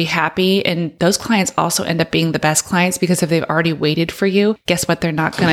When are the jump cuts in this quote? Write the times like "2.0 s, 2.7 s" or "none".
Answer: 0.9 s, 4.6 s